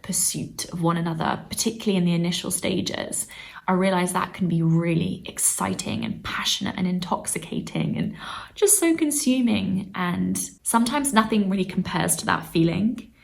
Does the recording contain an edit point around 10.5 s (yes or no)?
yes